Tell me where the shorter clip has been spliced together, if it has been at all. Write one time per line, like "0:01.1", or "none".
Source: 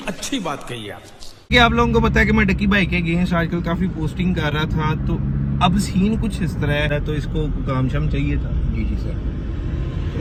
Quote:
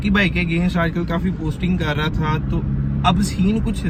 none